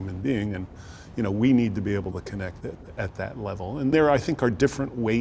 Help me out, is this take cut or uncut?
cut